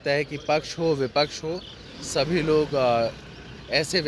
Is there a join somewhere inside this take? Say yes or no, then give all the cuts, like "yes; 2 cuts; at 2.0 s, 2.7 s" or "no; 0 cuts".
no; 0 cuts